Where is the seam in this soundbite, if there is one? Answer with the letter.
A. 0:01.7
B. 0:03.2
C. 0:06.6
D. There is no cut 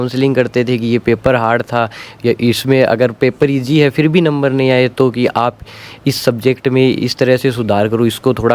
D